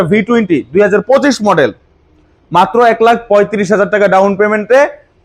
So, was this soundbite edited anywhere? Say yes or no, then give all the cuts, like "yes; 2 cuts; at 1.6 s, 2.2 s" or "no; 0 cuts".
no; 0 cuts